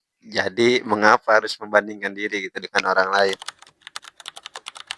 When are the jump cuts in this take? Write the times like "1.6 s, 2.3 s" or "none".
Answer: 3.4 s

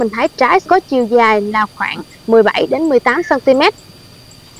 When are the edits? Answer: none

